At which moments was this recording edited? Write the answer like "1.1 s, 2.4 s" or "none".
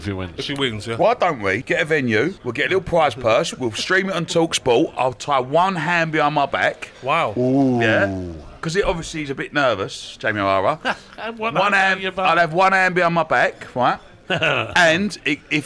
1.6 s, 2.4 s, 14.1 s

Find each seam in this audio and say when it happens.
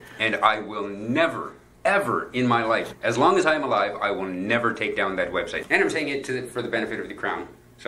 2.9 s, 5.6 s

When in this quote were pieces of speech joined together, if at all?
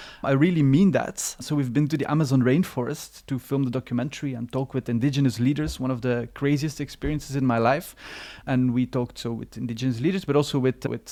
none

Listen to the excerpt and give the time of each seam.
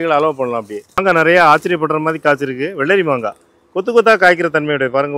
1.0 s

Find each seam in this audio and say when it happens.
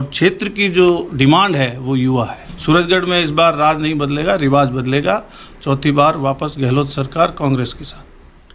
2.5 s

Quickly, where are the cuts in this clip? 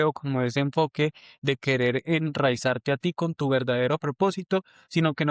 none

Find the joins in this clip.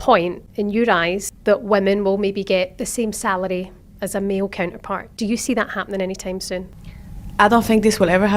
1.3 s, 5.0 s, 7.0 s

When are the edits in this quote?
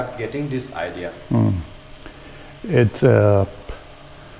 none

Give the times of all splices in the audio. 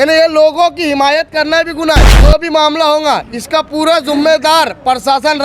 2.1 s

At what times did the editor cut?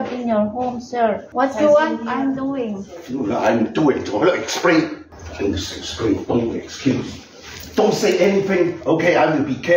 1.2 s, 5.1 s

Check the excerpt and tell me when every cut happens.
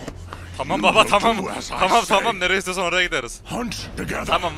none

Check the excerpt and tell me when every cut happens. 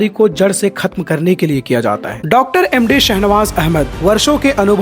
2.1 s

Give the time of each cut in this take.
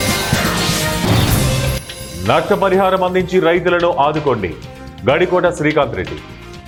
none

